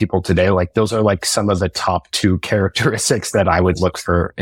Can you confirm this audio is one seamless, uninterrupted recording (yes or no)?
yes